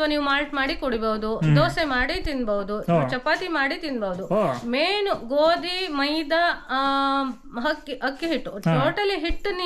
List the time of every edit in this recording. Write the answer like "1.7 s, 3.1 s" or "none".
none